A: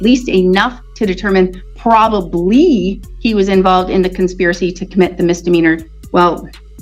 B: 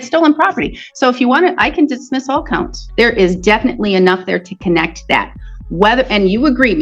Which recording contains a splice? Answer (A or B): B